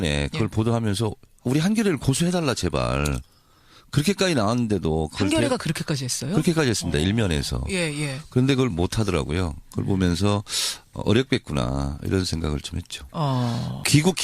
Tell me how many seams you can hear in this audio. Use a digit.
1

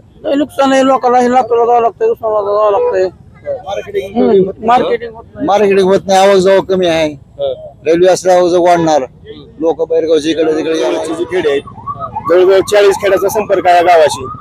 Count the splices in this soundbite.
1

